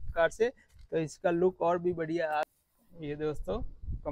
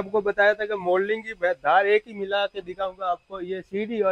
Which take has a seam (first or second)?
first